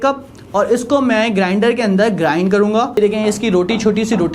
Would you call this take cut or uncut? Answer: cut